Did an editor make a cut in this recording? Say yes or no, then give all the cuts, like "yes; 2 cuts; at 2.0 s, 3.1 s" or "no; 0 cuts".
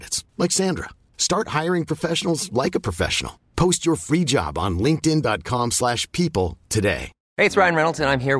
yes; 1 cut; at 7.2 s